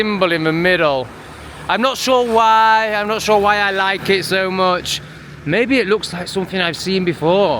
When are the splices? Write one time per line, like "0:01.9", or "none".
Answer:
none